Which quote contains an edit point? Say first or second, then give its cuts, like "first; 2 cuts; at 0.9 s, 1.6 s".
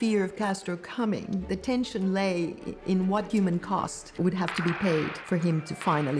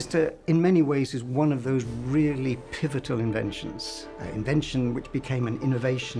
first; 2 cuts; at 3.3 s, 5.2 s